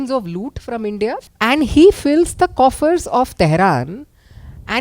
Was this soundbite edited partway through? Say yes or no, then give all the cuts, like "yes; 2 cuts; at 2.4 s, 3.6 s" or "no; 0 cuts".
yes; 1 cut; at 1.2 s